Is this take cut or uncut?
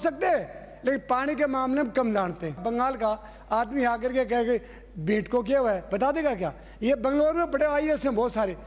uncut